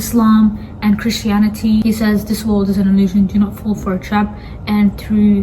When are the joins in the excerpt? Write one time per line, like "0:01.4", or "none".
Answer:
0:01.8